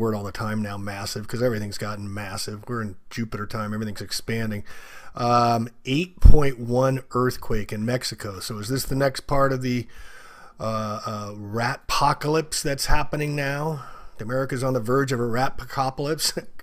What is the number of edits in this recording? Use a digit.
1